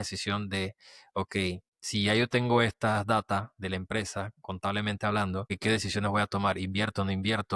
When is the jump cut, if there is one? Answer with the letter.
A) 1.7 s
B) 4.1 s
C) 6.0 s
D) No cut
A